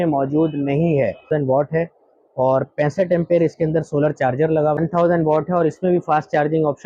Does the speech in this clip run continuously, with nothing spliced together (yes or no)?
no